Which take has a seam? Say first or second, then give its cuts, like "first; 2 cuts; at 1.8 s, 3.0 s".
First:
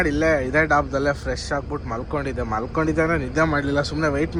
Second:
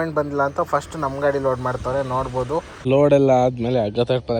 second; 1 cut; at 2.9 s